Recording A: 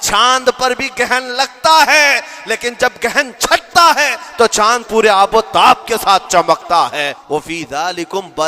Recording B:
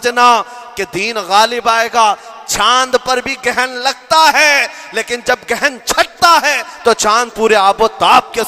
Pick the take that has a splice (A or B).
A